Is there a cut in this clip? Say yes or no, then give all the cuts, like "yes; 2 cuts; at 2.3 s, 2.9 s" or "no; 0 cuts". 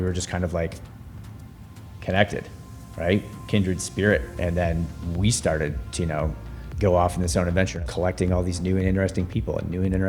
yes; 1 cut; at 7.8 s